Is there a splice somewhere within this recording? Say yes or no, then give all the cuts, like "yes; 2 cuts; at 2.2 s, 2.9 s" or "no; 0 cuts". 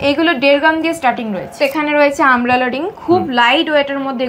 yes; 1 cut; at 1.5 s